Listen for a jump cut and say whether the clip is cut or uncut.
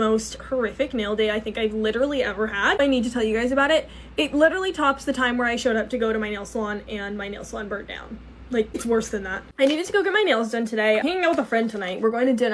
uncut